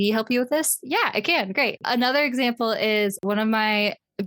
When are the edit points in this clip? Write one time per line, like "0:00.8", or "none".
0:01.8
0:03.2